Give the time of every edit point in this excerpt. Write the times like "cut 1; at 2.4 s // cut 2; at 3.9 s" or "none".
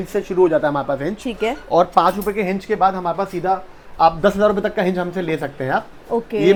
none